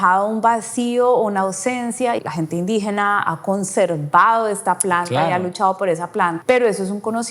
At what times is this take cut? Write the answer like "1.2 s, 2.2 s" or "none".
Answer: 2.2 s, 6.4 s